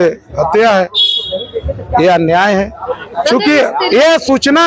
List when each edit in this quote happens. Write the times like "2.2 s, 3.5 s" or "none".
none